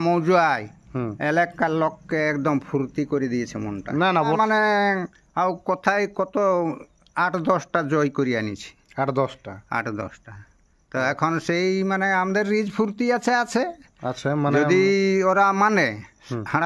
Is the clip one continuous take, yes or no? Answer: no